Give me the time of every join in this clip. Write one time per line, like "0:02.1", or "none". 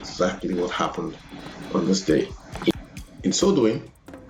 0:02.7